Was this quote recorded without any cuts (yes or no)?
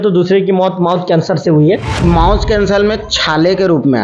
no